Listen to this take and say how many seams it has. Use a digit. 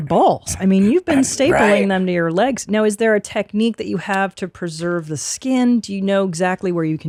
0